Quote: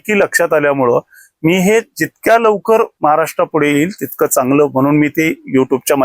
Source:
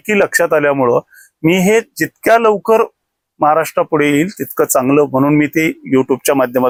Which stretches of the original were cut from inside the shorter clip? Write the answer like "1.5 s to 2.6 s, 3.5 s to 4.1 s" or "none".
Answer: 2.9 s to 3.3 s